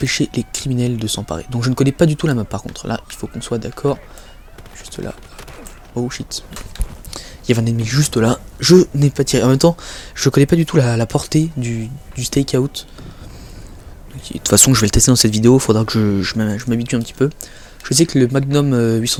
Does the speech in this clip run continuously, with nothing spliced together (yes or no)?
yes